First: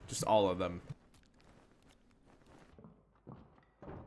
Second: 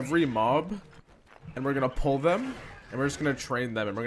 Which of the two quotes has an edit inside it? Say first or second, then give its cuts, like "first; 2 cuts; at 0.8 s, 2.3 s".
first; 1 cut; at 2.7 s